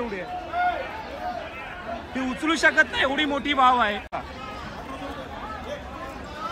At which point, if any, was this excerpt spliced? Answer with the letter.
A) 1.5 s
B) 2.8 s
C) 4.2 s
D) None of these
C